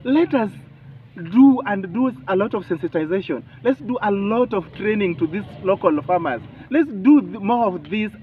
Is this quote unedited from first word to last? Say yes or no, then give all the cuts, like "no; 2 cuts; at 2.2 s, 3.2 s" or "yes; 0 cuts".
no; 1 cut; at 6.7 s